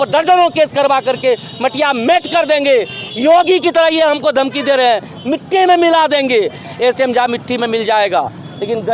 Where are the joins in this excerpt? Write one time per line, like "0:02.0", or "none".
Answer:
none